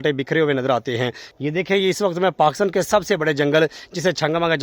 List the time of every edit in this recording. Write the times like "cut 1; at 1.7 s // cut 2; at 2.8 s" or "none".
cut 1; at 1.4 s